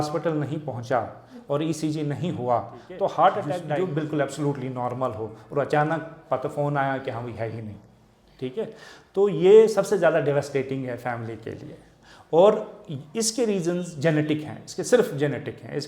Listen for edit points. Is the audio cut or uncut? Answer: cut